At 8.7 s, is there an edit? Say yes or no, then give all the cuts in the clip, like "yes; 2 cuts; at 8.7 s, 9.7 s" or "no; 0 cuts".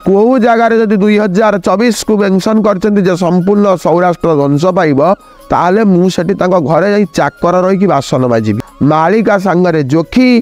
yes; 1 cut; at 8.7 s